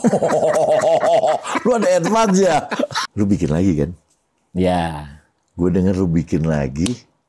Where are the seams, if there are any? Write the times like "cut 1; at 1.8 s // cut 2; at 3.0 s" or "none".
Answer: cut 1; at 3.0 s